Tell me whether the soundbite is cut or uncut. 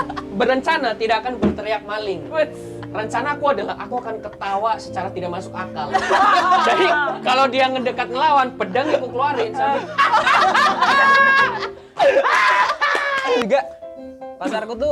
cut